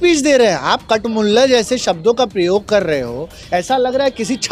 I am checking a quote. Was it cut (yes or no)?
no